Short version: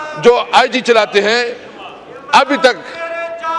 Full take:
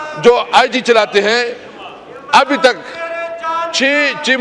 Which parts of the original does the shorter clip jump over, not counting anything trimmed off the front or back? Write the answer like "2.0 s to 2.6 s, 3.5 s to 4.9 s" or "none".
none